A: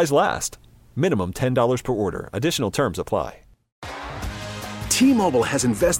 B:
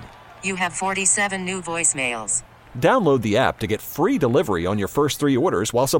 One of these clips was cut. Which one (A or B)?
A